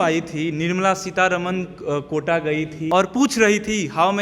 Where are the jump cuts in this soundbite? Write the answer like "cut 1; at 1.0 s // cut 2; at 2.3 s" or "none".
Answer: cut 1; at 2.8 s

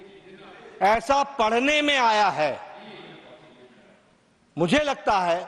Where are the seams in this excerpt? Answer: none

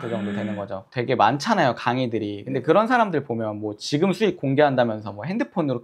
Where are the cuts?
none

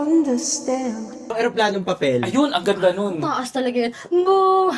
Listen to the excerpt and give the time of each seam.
cut 1; at 1.3 s

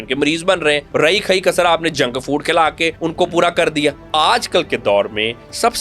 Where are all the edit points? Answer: cut 1; at 0.9 s // cut 2; at 3.0 s // cut 3; at 4.0 s

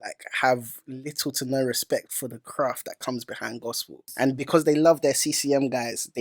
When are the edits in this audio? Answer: cut 1; at 4.1 s

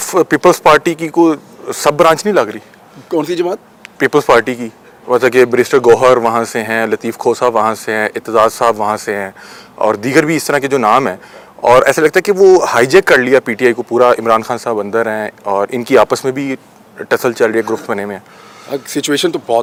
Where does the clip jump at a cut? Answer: none

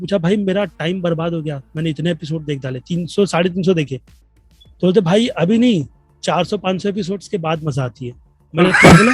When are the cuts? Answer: none

